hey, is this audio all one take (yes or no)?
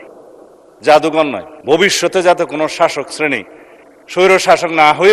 no